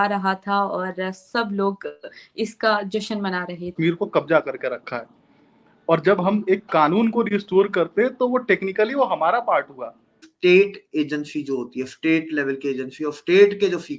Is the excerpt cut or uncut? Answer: cut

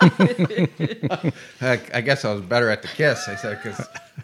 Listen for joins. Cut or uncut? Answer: uncut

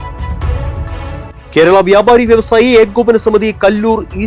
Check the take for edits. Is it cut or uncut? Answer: uncut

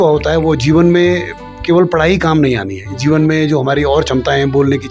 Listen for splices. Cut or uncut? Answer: uncut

